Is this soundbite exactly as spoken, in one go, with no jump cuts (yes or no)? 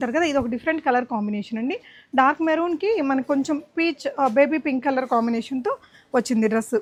yes